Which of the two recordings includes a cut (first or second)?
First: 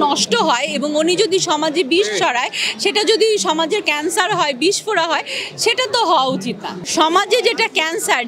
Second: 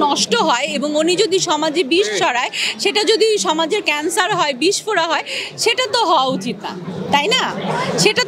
first